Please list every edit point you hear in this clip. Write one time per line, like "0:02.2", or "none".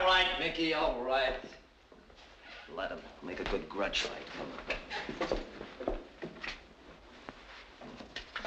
0:04.2